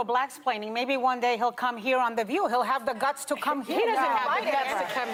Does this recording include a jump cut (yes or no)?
no